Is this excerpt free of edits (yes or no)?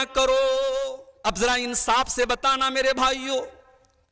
no